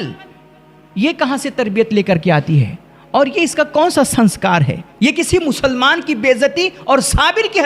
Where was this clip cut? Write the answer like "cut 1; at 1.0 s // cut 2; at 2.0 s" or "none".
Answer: cut 1; at 4.8 s